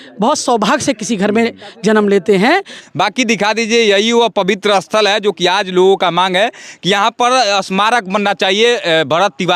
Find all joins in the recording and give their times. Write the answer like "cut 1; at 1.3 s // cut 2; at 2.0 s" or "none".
cut 1; at 2.8 s